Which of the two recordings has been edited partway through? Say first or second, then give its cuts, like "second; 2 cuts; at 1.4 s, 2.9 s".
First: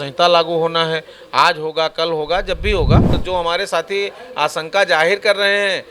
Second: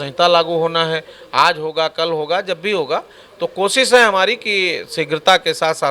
first; 1 cut; at 3.2 s